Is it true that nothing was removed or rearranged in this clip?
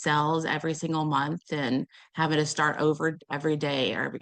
no; 1 cut; at 3.2 s

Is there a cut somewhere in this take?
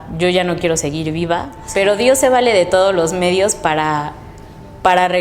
yes; 1 cut; at 1.6 s

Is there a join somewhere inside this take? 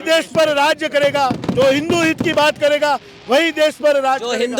no; 0 cuts

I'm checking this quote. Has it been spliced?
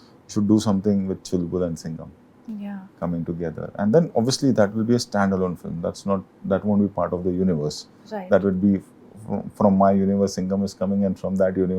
no; 0 cuts

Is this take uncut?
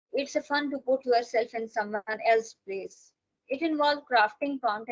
yes; 0 cuts

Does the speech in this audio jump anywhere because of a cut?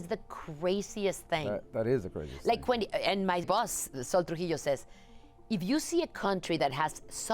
yes; 1 cut; at 3.5 s

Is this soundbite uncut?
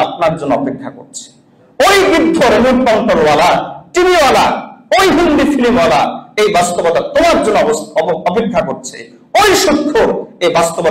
yes; 0 cuts

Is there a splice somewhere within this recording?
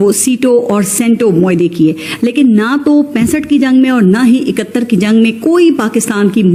no; 0 cuts

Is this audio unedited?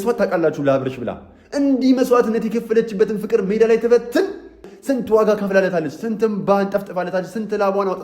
no; 1 cut; at 4.7 s

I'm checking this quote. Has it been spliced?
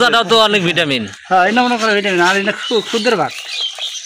no; 0 cuts

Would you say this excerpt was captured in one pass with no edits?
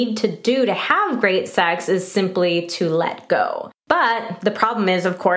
no; 1 cut; at 3.7 s

